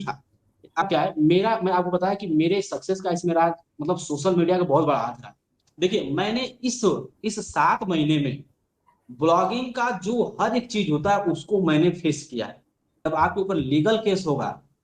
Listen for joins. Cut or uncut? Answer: cut